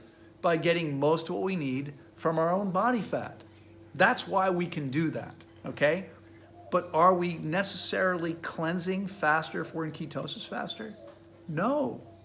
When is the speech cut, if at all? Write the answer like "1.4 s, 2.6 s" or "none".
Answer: 6.3 s